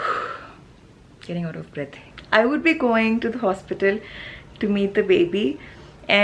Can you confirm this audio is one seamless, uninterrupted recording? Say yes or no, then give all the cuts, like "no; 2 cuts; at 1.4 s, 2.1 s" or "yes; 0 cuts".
no; 1 cut; at 2.0 s